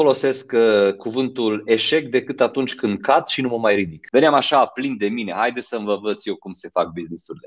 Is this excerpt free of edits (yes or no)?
no